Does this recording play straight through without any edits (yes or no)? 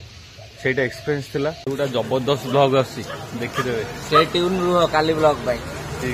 no